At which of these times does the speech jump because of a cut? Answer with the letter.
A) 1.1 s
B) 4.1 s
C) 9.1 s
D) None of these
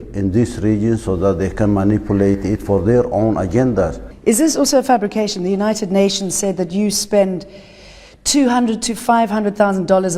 B